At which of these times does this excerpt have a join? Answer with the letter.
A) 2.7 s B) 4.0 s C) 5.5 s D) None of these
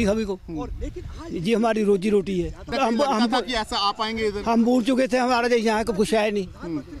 A